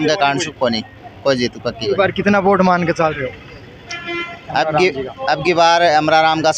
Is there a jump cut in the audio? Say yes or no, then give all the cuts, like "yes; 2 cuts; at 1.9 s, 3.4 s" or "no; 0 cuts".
no; 0 cuts